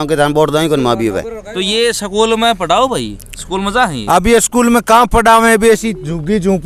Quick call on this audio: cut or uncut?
cut